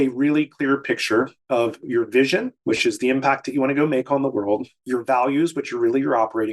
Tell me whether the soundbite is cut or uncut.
cut